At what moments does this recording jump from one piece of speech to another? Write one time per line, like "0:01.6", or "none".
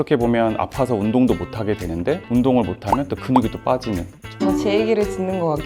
0:02.2
0:04.2